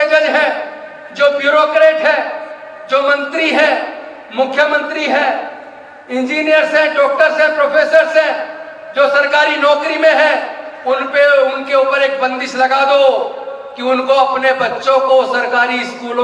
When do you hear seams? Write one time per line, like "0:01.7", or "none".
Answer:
none